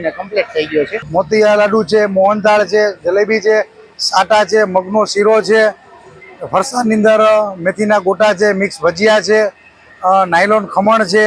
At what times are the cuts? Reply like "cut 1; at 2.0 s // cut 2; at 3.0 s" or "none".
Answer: cut 1; at 1.0 s